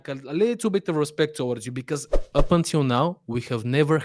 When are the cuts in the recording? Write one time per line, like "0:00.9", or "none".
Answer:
0:02.3